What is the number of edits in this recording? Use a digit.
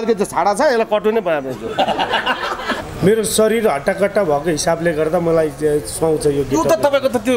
1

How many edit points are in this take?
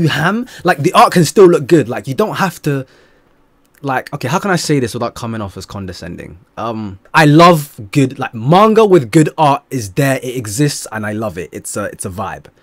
1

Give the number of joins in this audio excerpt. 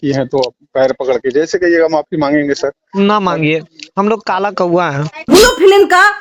1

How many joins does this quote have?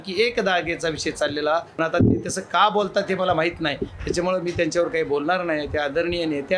1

